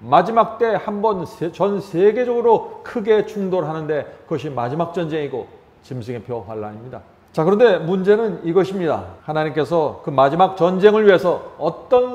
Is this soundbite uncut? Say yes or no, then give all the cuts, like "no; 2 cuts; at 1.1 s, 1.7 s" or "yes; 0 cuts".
no; 2 cuts; at 7.1 s, 9.2 s